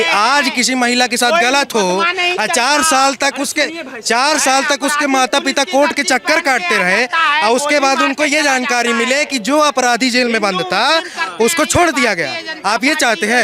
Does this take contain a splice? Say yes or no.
no